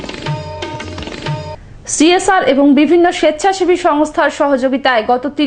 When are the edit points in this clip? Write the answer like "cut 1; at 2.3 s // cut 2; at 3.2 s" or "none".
none